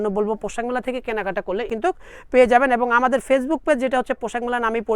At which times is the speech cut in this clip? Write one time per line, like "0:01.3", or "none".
0:01.7